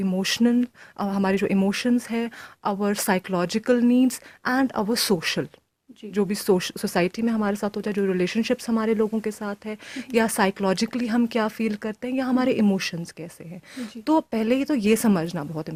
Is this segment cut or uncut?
uncut